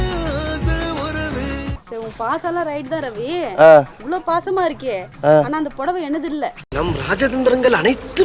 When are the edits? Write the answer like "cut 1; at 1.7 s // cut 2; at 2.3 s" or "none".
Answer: cut 1; at 1.8 s